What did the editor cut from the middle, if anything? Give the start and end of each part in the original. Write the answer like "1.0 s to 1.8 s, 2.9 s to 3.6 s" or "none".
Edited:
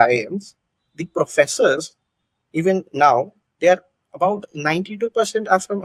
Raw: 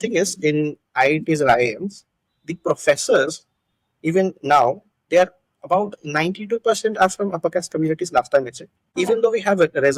none